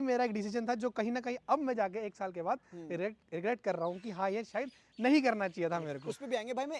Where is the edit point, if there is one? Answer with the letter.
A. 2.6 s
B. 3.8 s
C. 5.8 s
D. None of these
D